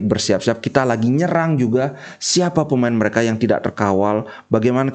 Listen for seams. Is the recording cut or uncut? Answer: uncut